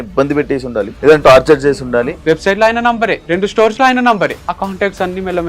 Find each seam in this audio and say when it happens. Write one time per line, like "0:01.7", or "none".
0:00.9
0:02.1
0:03.2
0:04.4